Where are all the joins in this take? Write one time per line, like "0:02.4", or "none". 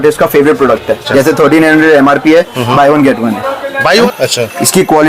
0:01.0
0:04.1

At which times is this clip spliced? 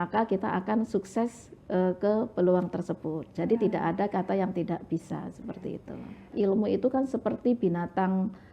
0:06.3

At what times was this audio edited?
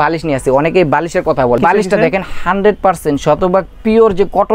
0:01.6

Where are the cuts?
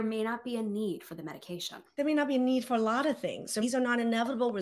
0:01.8
0:03.6

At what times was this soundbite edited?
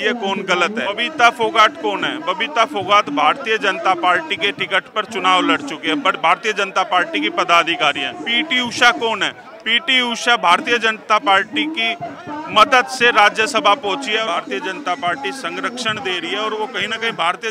0:01.0
0:08.2
0:14.2

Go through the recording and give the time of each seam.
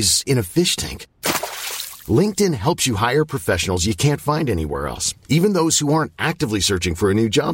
none

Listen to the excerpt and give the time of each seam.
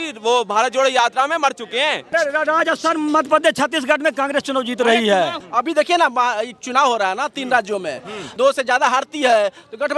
0:02.1
0:05.4
0:08.2

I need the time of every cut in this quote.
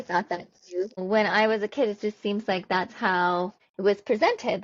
0:01.0
0:03.6

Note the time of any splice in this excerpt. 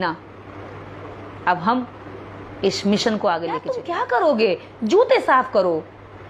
0:03.9

